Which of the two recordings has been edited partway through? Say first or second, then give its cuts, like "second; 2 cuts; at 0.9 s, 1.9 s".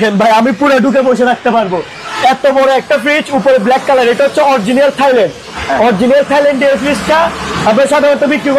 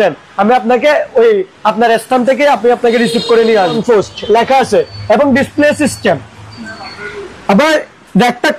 second; 1 cut; at 3.7 s